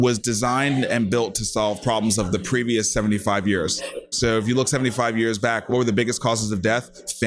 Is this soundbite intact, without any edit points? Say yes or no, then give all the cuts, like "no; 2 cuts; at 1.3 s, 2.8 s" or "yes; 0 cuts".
no; 2 cuts; at 4.0 s, 5.7 s